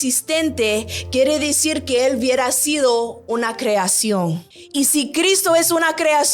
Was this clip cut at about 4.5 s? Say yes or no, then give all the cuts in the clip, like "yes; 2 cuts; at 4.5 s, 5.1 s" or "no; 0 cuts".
yes; 1 cut; at 4.5 s